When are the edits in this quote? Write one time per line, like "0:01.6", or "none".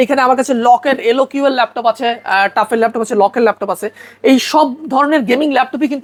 none

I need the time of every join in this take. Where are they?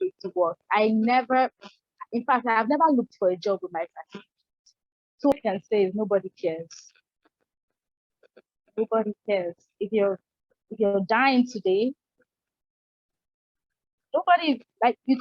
0:05.3

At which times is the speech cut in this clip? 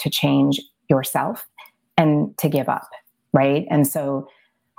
none

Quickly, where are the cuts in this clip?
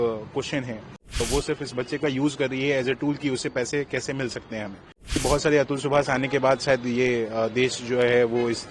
0:01.2
0:05.2

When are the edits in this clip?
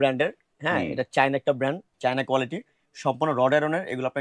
0:01.9

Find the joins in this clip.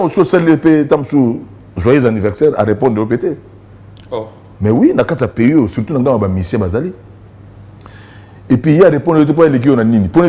none

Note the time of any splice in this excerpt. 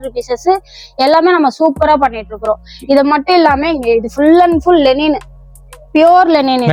none

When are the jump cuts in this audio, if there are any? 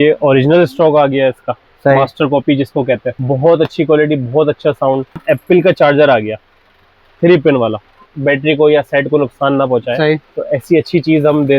0:03.1
0:05.2
0:08.0

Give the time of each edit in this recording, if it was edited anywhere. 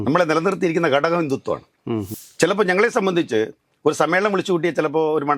0:02.2

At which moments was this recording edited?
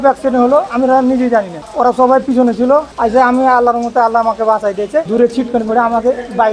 0:01.6
0:02.9
0:05.1

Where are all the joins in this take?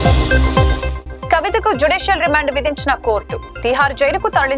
0:00.9

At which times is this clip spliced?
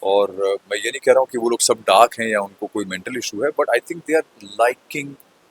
none

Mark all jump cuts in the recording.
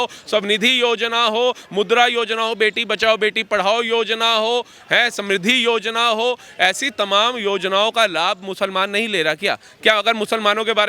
none

